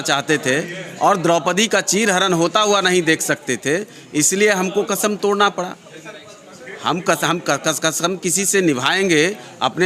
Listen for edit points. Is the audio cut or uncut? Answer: uncut